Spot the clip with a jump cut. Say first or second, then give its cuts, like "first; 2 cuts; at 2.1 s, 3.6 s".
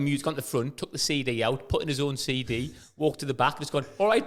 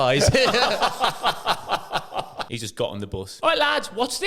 second; 2 cuts; at 2.4 s, 3.3 s